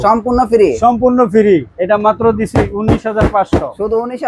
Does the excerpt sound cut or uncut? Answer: cut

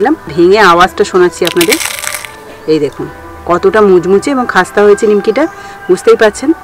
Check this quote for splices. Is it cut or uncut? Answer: uncut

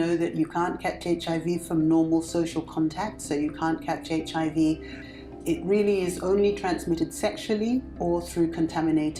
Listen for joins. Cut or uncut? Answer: uncut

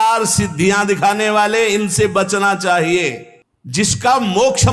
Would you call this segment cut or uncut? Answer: uncut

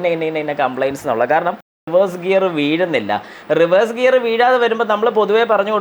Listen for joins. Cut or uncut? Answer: cut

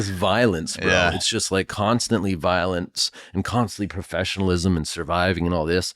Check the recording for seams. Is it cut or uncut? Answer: uncut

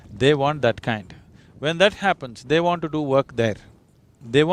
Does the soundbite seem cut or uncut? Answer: uncut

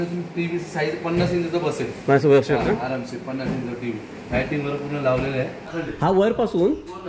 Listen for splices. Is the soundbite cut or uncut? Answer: cut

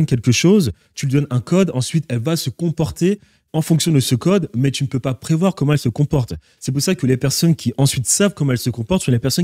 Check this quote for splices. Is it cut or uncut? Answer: uncut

